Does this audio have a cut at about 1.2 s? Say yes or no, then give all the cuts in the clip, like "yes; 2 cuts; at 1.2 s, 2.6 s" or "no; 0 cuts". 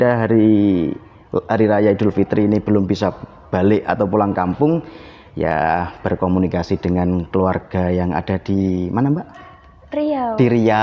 no; 0 cuts